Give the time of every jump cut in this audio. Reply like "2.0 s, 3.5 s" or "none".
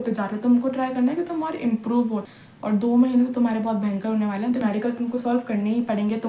2.1 s, 4.6 s